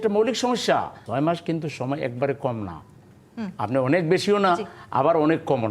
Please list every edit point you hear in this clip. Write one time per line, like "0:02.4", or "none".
0:01.0